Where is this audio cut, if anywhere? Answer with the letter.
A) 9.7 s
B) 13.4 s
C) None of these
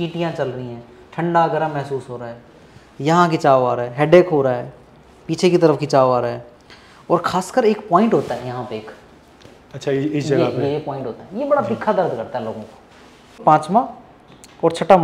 B